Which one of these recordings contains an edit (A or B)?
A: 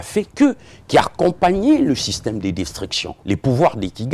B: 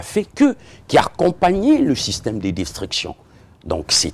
A